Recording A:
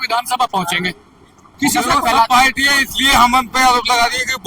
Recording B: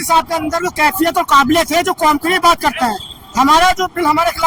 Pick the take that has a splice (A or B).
A